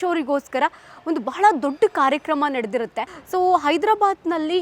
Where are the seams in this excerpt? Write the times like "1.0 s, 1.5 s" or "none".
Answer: 3.1 s